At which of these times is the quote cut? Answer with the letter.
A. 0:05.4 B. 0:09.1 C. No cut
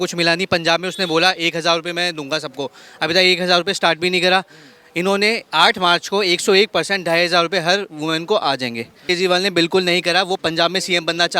B